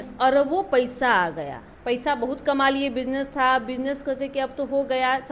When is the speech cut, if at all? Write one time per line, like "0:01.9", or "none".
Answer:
0:01.7